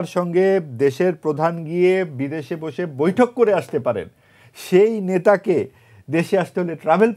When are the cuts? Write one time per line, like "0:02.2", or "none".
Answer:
none

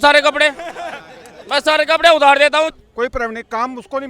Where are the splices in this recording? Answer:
0:02.8

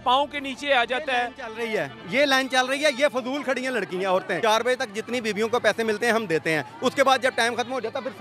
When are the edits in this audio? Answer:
0:04.3

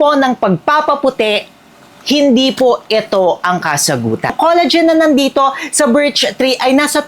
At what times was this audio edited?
0:04.3

